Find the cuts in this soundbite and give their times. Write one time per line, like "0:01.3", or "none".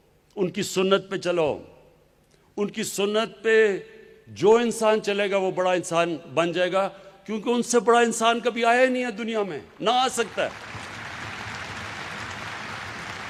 none